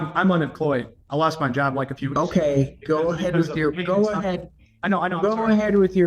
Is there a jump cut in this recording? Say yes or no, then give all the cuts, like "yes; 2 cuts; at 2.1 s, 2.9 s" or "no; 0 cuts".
yes; 1 cut; at 1.0 s